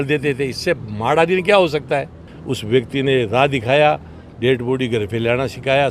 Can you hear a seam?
yes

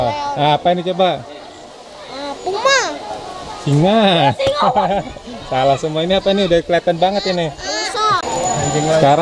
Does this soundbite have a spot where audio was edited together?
yes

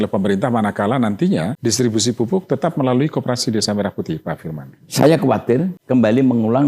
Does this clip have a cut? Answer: yes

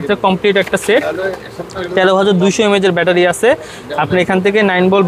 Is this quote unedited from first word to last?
yes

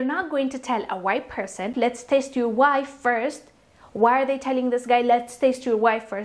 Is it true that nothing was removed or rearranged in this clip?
no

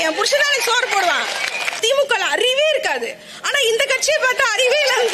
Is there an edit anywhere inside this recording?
yes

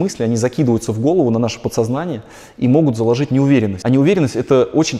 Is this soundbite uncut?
yes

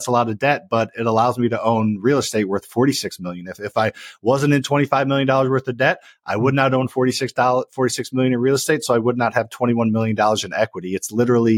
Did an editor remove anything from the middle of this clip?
no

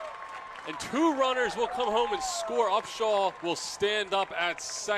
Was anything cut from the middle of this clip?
yes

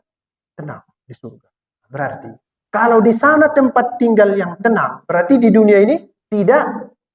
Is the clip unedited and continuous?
no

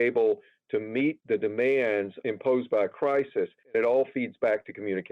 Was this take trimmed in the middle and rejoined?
yes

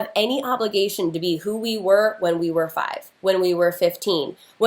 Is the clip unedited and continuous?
yes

